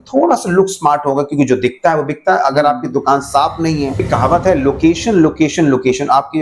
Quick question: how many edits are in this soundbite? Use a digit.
1